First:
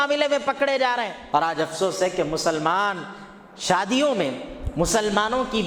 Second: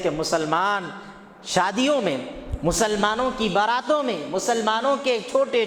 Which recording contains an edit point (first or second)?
first